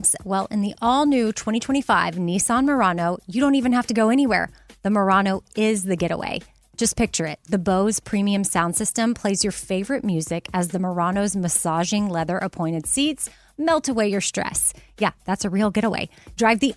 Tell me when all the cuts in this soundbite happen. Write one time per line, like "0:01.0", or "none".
none